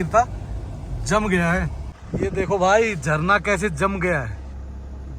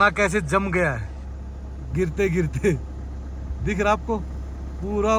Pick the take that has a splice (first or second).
first